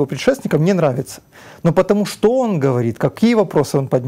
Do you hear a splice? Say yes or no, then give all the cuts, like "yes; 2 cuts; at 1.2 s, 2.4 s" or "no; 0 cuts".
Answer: no; 0 cuts